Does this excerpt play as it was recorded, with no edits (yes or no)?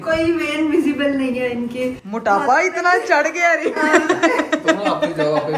yes